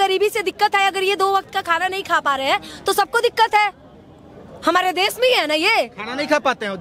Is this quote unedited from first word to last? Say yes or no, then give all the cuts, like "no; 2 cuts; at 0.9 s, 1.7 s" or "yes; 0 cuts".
yes; 0 cuts